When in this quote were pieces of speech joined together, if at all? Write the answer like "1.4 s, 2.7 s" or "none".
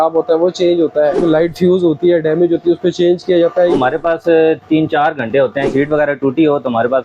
1.2 s, 3.7 s, 5.7 s